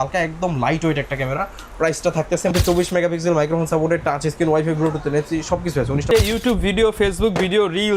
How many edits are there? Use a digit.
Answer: 2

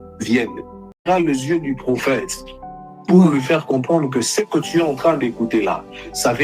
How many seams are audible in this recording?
1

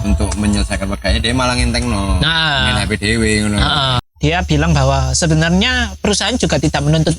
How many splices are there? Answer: 1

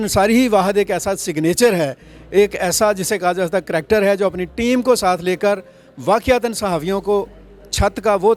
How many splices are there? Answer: 0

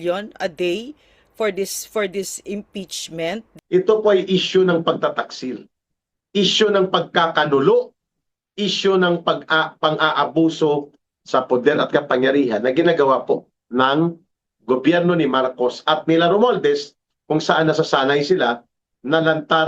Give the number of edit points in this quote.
1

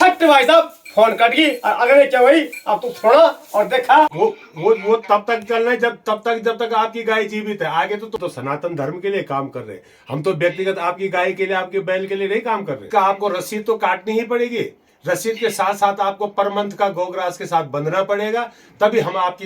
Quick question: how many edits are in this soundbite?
3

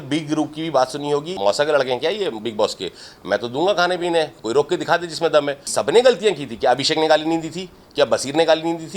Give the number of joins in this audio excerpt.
1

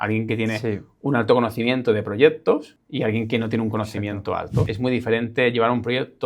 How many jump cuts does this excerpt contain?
2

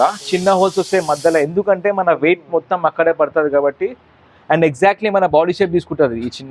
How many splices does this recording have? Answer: 0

